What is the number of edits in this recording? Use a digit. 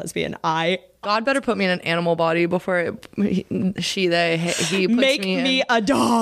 1